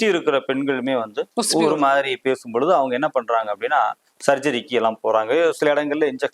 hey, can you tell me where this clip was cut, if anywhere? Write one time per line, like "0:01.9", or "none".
0:01.2